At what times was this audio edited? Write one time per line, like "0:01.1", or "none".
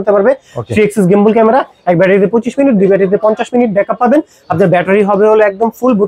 none

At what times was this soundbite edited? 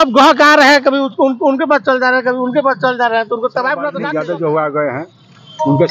0:04.0

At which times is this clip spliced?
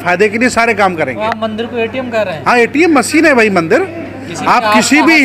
none

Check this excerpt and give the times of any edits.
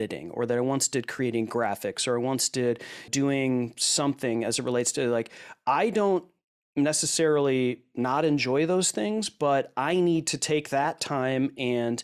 0:03.1

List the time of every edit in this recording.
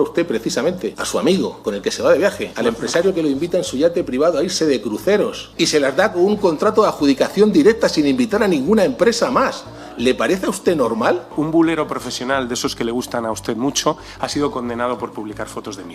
0:01.0
0:01.6
0:02.5
0:05.4
0:11.3

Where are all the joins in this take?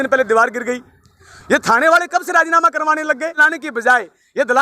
0:03.4

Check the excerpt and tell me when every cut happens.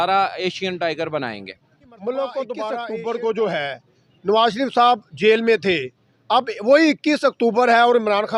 0:02.9

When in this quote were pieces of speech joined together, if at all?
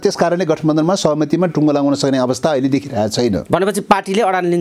none

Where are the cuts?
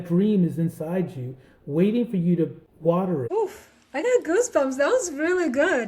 0:02.8

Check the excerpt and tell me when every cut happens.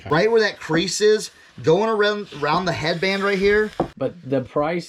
0:03.9

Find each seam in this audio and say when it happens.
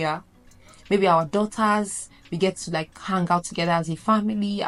none

